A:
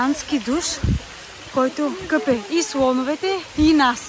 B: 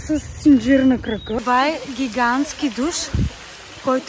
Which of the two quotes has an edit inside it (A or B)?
B